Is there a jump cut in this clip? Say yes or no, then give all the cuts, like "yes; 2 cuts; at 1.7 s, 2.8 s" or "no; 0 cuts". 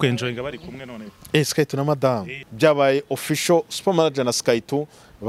yes; 1 cut; at 2.4 s